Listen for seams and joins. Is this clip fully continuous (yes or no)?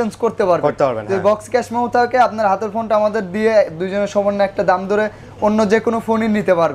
yes